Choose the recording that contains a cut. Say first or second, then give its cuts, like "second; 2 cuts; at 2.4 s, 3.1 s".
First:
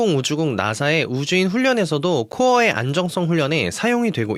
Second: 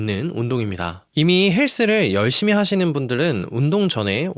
second; 1 cut; at 1.0 s